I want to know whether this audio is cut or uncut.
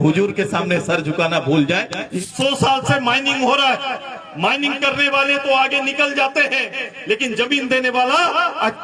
cut